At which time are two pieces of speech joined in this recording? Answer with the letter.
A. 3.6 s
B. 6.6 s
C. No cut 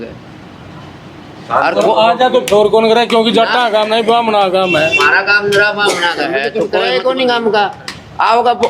B